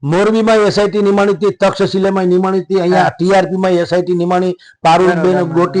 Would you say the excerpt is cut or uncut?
uncut